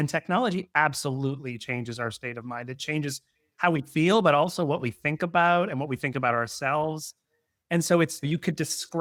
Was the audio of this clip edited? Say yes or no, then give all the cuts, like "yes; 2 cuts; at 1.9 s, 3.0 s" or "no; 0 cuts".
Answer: no; 0 cuts